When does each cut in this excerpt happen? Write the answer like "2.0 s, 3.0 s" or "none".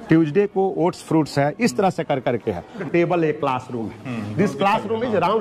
2.8 s